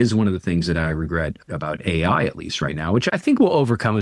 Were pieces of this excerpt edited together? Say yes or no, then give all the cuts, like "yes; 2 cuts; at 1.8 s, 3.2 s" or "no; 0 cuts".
no; 0 cuts